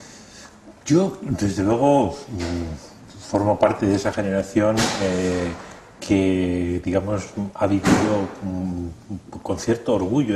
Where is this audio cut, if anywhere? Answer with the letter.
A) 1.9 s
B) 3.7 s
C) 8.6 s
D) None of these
A